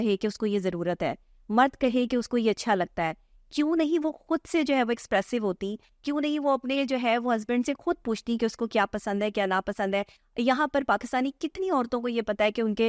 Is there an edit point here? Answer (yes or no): no